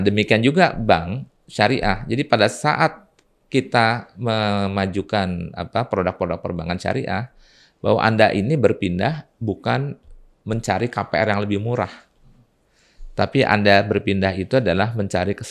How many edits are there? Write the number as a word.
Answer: zero